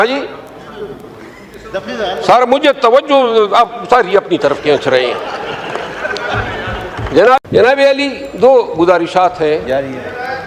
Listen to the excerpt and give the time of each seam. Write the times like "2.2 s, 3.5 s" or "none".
7.4 s